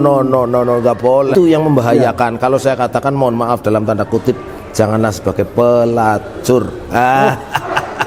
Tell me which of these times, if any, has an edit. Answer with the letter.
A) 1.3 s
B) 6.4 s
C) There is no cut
A